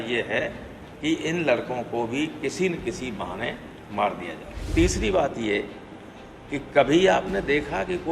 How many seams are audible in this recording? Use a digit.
1